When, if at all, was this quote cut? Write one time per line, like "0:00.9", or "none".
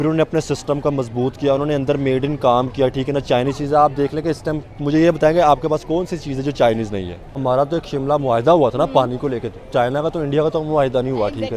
0:07.4